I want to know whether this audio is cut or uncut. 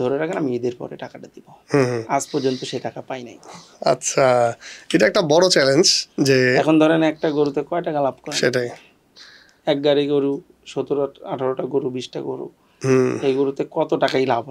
uncut